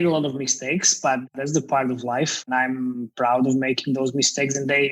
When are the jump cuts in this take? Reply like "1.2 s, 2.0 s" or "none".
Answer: 1.3 s, 2.4 s